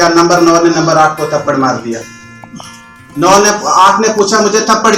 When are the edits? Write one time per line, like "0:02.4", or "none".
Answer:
none